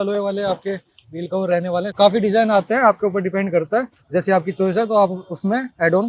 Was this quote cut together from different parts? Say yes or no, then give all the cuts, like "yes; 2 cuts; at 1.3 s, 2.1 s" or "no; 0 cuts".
no; 0 cuts